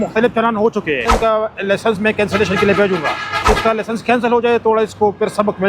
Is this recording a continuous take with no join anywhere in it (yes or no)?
no